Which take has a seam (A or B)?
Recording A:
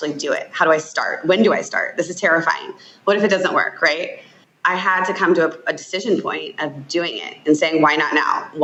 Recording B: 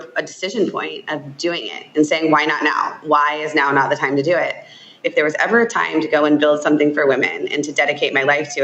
B